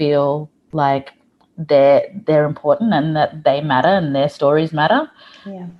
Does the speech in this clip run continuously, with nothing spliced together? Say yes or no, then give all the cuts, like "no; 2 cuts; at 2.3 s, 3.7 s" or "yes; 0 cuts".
yes; 0 cuts